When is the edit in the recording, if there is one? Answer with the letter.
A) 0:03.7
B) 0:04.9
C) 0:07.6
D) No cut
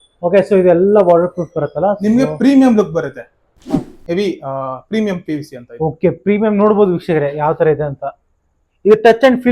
A